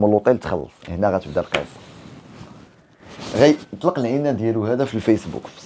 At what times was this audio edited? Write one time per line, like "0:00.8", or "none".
none